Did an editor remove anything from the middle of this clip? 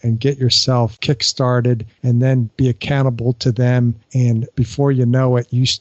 yes; 3 cuts; at 1.0 s, 2.3 s, 4.2 s

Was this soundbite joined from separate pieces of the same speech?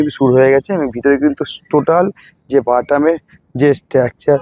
no; 0 cuts

